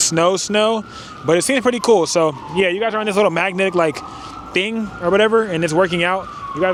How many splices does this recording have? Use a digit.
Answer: 0